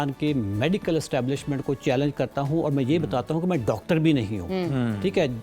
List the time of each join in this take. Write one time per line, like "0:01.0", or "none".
none